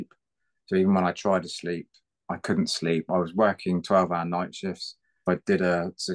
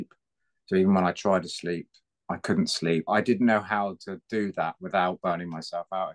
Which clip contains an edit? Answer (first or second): second